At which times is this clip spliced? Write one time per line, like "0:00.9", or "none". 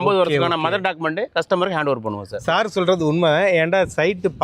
0:02.3